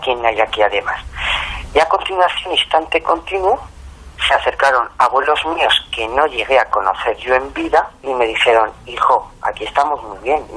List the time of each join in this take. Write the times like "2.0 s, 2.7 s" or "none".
8.0 s